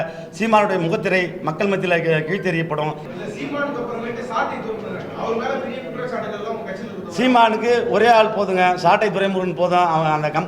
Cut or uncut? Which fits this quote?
cut